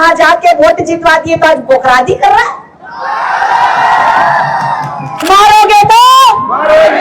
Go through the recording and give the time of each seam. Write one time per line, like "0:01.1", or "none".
0:05.1